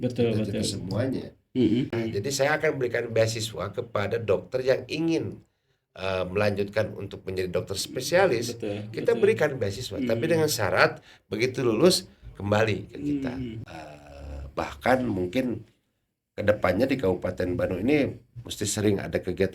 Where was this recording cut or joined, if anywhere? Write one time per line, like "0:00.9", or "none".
0:02.0
0:13.6